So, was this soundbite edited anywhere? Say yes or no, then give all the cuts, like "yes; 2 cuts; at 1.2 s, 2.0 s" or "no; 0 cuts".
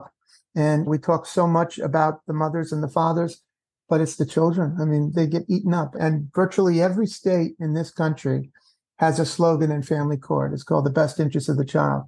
yes; 3 cuts; at 0.9 s, 5.1 s, 5.9 s